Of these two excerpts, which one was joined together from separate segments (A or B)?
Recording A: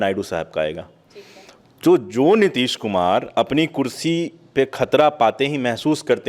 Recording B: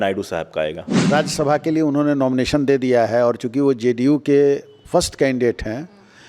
B